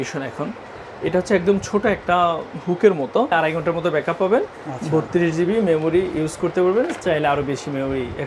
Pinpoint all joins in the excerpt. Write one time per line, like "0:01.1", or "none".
0:03.3